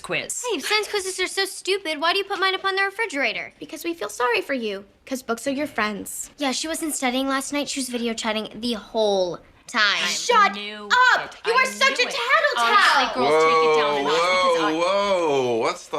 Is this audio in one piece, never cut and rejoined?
no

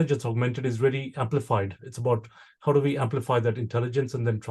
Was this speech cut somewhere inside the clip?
no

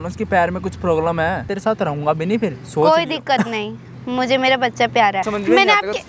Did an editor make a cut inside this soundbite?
yes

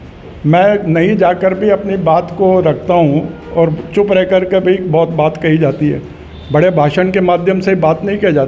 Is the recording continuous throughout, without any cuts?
yes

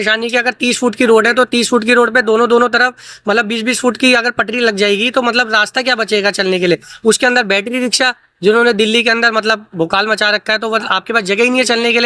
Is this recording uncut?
yes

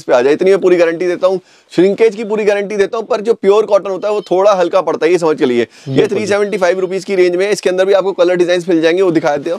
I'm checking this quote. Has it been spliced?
no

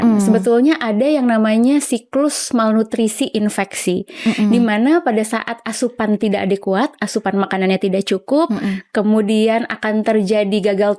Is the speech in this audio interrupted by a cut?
no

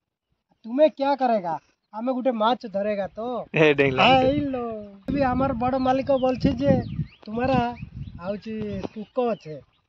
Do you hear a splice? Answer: yes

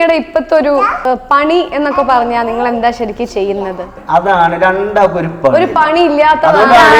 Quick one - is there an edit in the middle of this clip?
yes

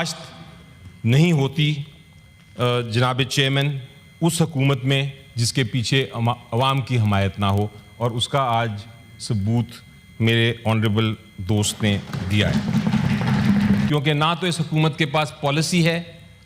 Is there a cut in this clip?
yes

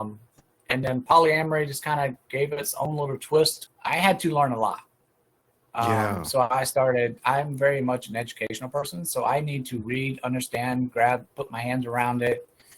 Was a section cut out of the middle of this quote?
yes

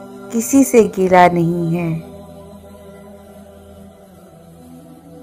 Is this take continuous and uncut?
no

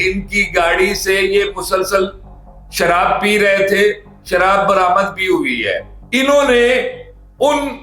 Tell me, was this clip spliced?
no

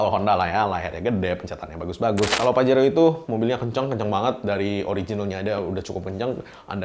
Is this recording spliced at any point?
yes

